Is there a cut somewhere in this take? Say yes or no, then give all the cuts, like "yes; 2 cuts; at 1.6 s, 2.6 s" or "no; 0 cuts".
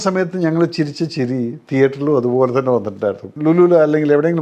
yes; 1 cut; at 3.3 s